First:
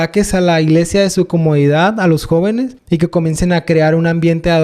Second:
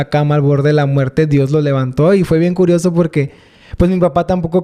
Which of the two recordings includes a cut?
first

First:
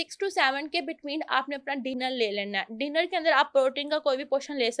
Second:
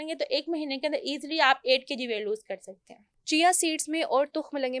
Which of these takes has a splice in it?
second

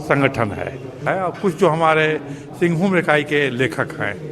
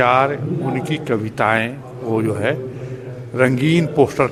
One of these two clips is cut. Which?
first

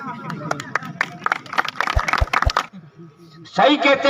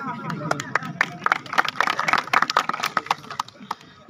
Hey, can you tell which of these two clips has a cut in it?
first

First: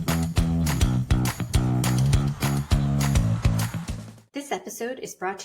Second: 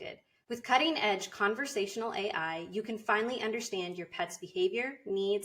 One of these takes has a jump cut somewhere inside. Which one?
first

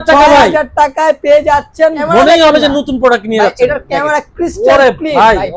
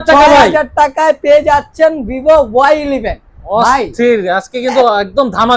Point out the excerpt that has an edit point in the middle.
first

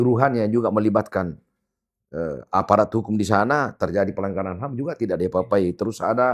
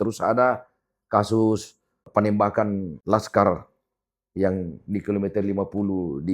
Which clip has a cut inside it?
second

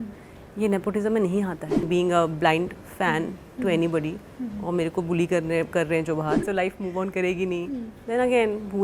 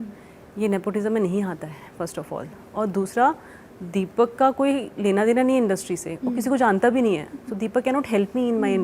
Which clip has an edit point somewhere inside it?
first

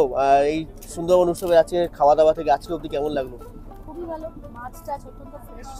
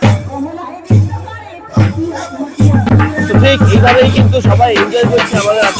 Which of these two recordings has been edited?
second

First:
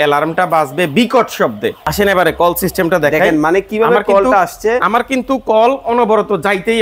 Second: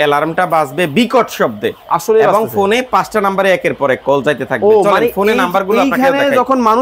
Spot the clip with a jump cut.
first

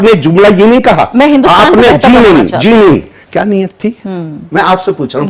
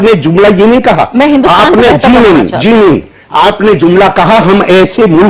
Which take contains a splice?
first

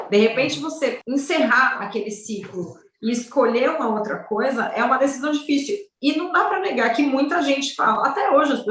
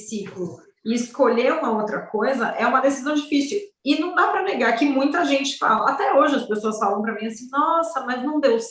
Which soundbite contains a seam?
first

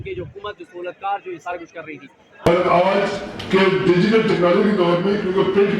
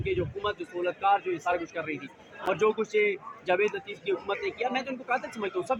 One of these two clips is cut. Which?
first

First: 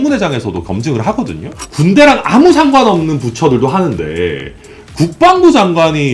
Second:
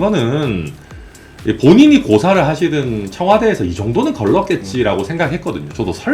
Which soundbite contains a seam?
first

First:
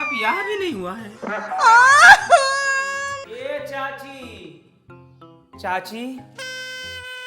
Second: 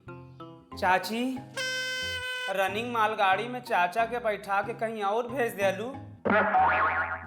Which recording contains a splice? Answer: first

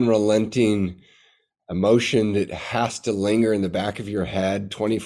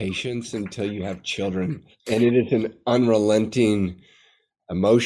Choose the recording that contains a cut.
second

